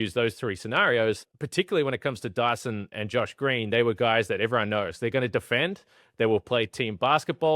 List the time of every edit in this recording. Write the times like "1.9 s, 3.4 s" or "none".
1.3 s, 2.9 s